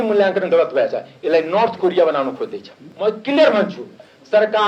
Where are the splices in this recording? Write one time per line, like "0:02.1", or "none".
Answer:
0:02.8